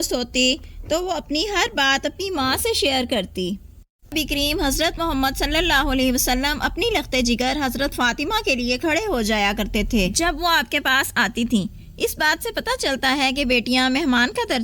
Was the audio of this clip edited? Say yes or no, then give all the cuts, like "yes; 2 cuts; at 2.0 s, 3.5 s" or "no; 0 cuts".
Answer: yes; 1 cut; at 4.1 s